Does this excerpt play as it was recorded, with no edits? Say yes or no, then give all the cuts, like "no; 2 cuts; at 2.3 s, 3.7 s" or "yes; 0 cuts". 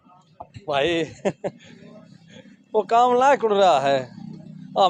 yes; 0 cuts